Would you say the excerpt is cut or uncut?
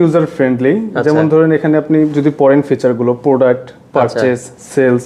uncut